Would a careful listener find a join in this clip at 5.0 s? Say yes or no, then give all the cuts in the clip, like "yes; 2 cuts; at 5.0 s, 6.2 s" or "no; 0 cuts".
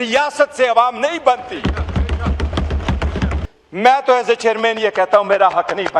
no; 1 cut; at 3.4 s